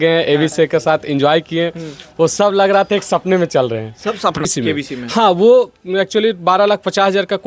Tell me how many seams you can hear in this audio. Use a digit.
1